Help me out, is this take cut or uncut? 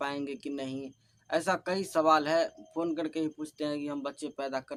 uncut